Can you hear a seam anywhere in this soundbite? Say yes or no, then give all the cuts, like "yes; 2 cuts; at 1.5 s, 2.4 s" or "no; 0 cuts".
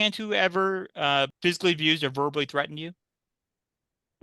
yes; 1 cut; at 1.3 s